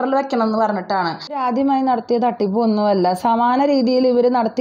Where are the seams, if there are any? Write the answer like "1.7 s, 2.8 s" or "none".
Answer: 1.2 s